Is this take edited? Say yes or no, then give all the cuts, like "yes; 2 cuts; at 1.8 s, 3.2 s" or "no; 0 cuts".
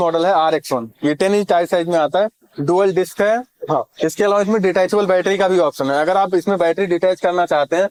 no; 0 cuts